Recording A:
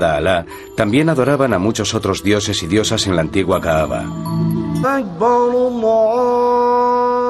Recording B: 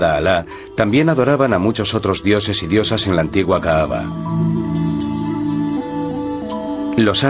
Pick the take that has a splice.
B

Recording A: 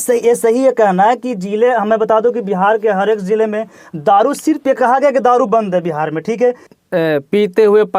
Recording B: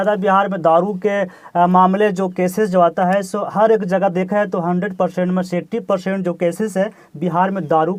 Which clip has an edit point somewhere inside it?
A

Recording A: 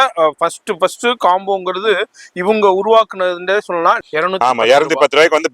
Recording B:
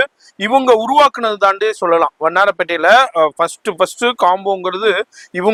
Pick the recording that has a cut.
A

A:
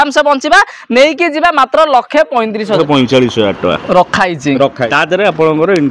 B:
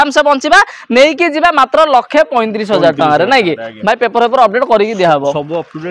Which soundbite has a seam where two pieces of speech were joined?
A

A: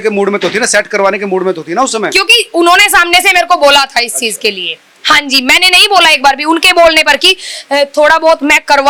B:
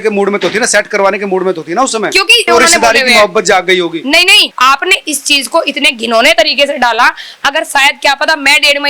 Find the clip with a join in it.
B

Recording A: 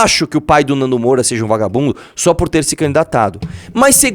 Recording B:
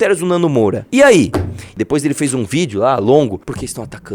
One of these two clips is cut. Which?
B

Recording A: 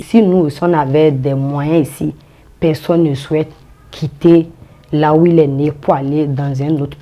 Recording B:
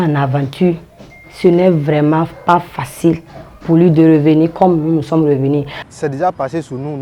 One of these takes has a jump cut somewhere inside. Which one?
B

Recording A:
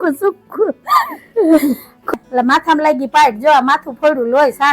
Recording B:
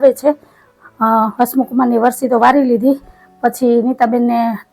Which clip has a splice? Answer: A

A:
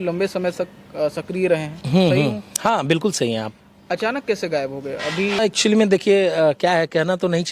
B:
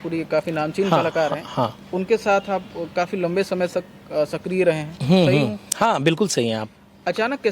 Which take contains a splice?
A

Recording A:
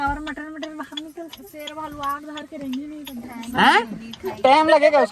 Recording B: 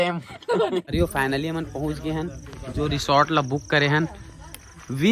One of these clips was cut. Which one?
B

